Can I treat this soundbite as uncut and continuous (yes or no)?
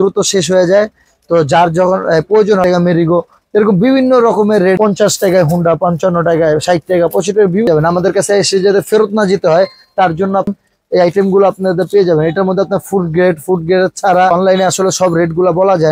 no